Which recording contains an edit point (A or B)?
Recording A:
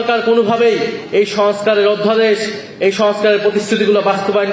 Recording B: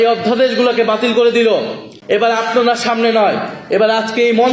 B